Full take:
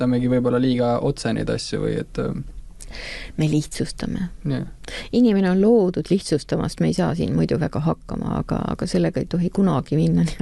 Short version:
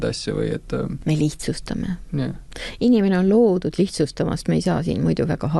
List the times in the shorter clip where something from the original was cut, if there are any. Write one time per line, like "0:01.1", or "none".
0:01.0